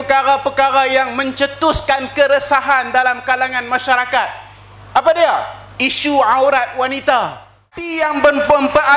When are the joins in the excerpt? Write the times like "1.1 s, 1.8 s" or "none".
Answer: 7.9 s

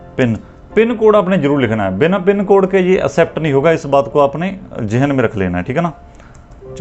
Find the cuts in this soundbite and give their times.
none

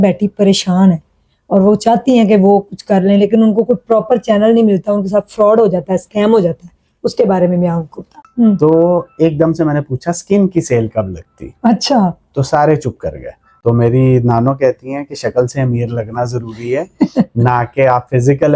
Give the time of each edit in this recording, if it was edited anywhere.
8.2 s, 13.4 s

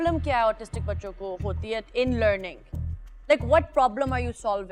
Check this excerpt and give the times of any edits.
none

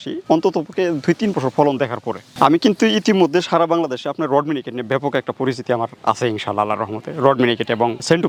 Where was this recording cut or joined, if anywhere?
none

